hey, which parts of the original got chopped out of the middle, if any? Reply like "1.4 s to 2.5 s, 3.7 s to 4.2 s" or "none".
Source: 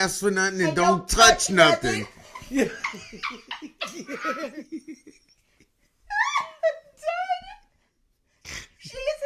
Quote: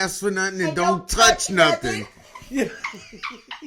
none